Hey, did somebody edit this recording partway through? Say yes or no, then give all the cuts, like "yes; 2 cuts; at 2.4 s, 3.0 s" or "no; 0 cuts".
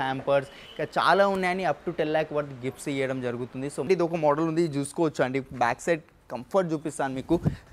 yes; 1 cut; at 3.9 s